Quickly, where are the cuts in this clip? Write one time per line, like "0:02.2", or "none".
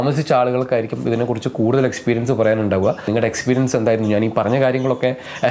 0:03.1